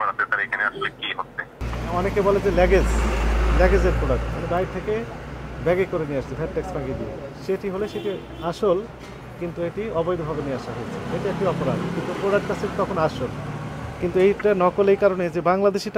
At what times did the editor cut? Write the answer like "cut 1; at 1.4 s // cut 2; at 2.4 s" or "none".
cut 1; at 1.7 s